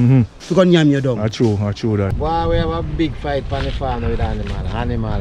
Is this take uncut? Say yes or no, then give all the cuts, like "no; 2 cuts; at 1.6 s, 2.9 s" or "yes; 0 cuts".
no; 1 cut; at 2.1 s